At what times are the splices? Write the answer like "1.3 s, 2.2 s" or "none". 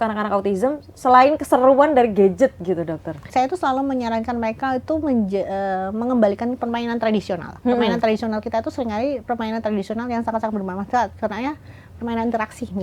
3.2 s